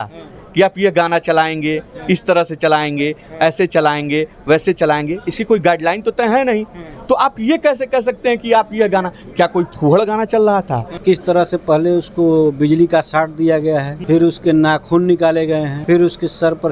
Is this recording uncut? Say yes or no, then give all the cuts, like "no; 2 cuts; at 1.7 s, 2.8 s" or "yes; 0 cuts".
no; 3 cuts; at 11.0 s, 13.9 s, 15.7 s